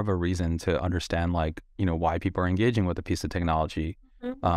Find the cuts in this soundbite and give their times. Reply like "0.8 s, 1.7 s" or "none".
1.6 s